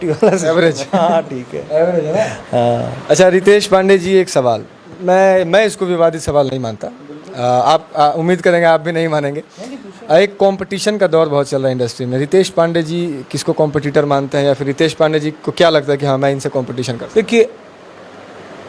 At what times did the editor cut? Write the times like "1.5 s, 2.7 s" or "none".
none